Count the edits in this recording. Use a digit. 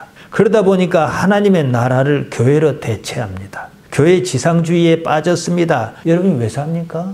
1